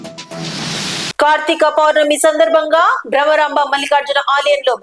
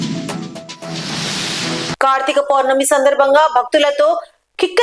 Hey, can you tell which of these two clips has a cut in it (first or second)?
first